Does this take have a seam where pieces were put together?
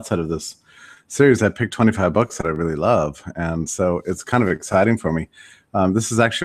yes; 1 cut; at 1.7 s

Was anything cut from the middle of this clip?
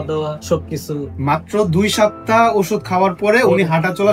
no; 0 cuts

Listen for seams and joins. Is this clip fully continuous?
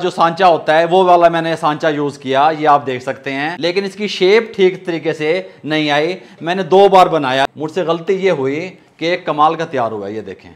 no; 2 cuts; at 3.5 s, 7.6 s

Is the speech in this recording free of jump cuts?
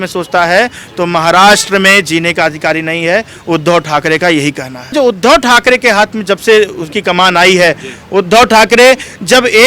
no; 1 cut; at 4.9 s

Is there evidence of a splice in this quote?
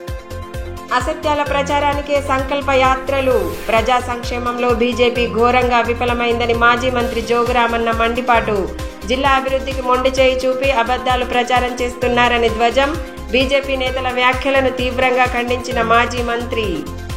yes; 1 cut; at 0.9 s

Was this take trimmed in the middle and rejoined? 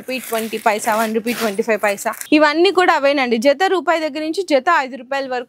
yes; 1 cut; at 2.1 s

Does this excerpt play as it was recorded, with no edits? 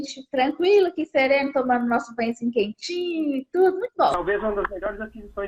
no; 1 cut; at 4.1 s

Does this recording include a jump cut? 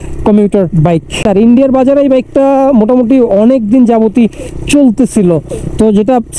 yes; 1 cut; at 1.2 s

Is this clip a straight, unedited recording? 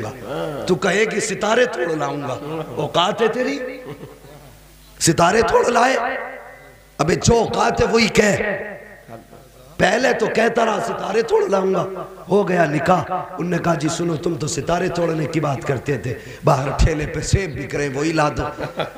yes; 0 cuts

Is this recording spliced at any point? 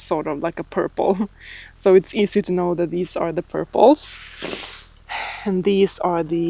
no; 0 cuts

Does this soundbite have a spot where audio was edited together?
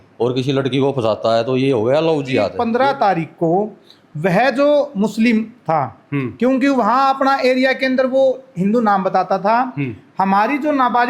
yes; 1 cut; at 2.5 s

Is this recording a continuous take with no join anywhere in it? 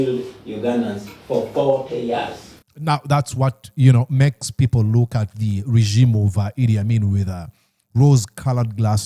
yes; 0 cuts

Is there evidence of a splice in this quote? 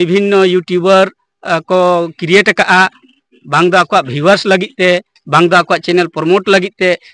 no; 0 cuts

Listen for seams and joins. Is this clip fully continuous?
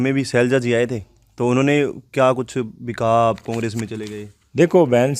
yes; 0 cuts

